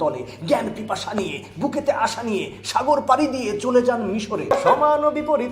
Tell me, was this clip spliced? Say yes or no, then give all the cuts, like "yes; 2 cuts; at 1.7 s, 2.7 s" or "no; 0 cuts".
yes; 1 cut; at 4.5 s